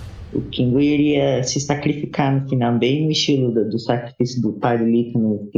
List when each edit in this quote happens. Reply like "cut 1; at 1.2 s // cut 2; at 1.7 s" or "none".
none